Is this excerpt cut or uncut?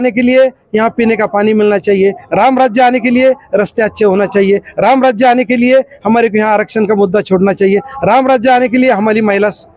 uncut